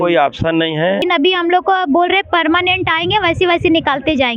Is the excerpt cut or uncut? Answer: cut